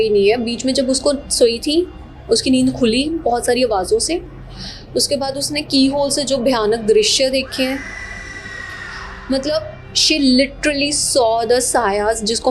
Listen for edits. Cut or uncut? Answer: uncut